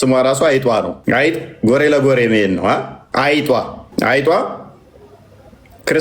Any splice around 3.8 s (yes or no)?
yes